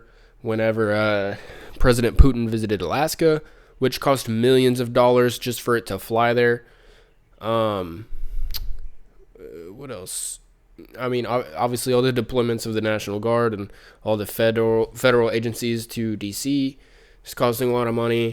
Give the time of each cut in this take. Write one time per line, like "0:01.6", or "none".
none